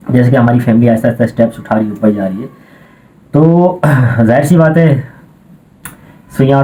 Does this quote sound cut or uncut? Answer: uncut